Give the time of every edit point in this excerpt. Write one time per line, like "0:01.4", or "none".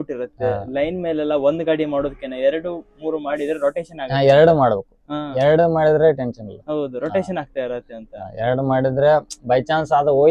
none